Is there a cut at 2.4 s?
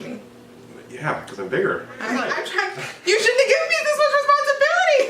yes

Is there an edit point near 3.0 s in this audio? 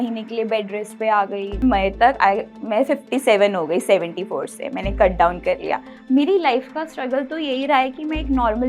no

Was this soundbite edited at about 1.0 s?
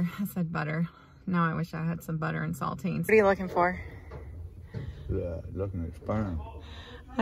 no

